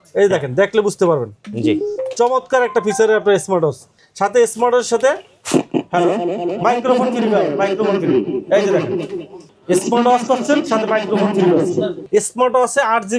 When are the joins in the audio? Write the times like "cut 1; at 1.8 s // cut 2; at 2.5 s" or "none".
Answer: cut 1; at 12.0 s